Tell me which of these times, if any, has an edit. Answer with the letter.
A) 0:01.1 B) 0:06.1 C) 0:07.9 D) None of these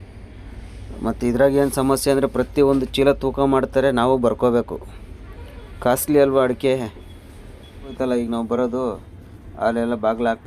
C